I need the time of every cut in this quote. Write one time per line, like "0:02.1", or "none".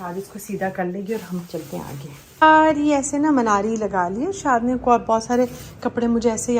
0:02.4